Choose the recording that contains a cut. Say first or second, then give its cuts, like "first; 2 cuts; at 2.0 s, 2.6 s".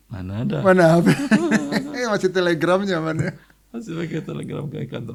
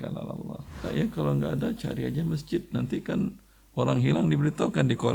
second; 1 cut; at 0.9 s